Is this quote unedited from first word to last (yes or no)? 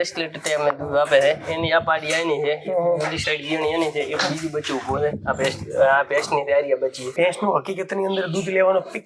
no